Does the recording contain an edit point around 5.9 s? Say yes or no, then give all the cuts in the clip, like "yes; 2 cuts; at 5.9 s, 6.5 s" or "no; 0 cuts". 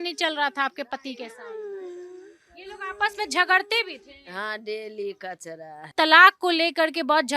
yes; 1 cut; at 5.9 s